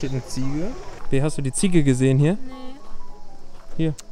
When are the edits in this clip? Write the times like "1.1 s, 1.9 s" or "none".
0.9 s